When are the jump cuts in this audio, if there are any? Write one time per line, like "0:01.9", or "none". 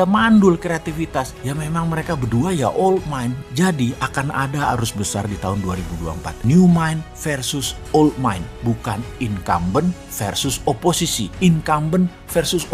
none